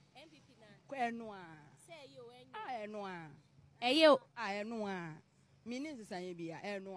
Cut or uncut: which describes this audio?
uncut